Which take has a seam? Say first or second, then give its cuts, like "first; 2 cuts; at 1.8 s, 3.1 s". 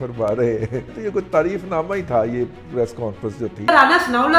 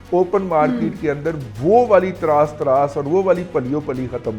first; 2 cuts; at 0.9 s, 3.7 s